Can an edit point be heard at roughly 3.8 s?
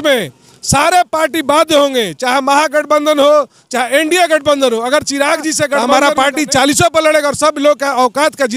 no; 1 cut; at 5.8 s

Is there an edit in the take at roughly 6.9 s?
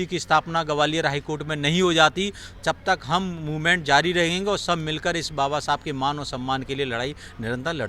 no; 0 cuts

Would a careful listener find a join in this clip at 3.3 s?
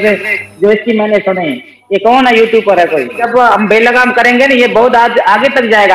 yes; 1 cut; at 3.3 s

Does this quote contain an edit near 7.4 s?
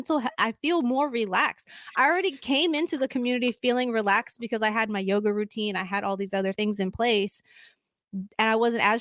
no; 0 cuts

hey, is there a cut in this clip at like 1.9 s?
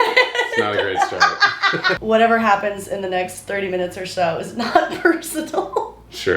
yes; 1 cut; at 1.9 s

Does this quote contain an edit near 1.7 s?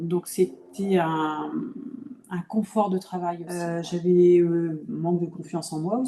no; 1 cut; at 3.5 s

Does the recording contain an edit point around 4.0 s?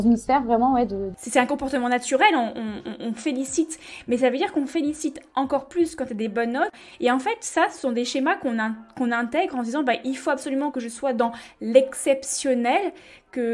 no; 2 cuts; at 1.0 s, 6.8 s

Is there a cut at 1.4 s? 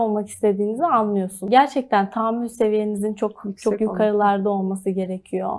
yes; 1 cut; at 1.4 s

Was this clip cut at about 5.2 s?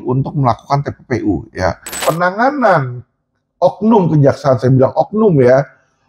no; 1 cut; at 2.1 s

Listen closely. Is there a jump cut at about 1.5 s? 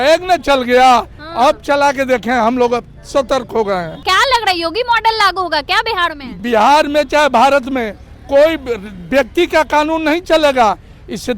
no; 2 cuts; at 4.0 s, 6.3 s

